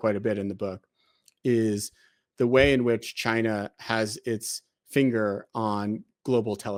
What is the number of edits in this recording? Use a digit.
0